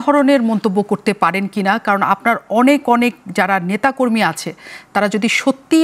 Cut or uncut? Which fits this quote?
uncut